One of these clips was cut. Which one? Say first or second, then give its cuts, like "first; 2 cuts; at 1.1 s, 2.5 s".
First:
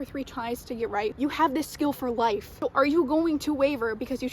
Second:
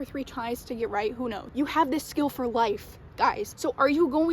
first; 2 cuts; at 1.1 s, 2.5 s